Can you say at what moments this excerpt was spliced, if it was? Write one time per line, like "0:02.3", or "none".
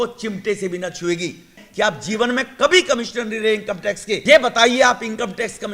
0:01.6
0:04.1